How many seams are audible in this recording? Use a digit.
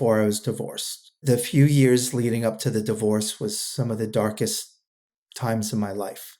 1